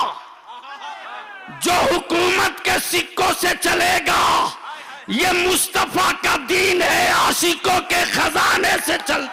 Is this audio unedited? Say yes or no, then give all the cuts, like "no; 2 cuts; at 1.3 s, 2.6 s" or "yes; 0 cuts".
yes; 0 cuts